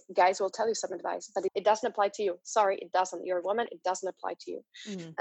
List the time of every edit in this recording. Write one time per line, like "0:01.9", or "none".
0:01.5